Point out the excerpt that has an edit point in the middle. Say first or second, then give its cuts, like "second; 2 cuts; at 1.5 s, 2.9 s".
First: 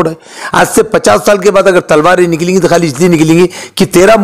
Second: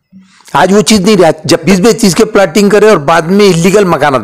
second; 1 cut; at 1.6 s